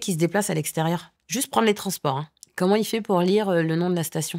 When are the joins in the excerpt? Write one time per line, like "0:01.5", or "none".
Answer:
0:01.2
0:02.4